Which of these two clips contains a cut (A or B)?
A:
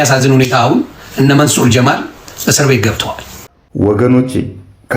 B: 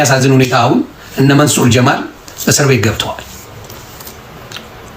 A